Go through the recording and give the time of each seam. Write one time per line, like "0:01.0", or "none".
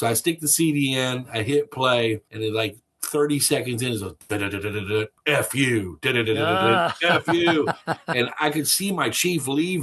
0:02.3